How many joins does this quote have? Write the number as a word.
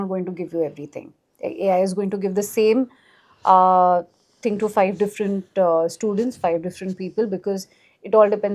zero